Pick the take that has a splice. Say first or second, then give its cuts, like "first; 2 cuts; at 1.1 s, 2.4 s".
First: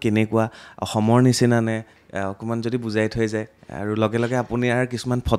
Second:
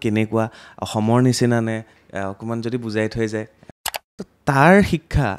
second; 1 cut; at 3.8 s